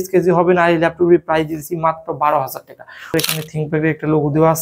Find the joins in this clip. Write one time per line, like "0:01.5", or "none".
0:03.1